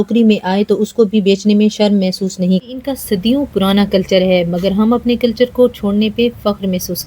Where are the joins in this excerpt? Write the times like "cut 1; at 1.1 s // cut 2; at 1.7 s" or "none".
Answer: cut 1; at 2.7 s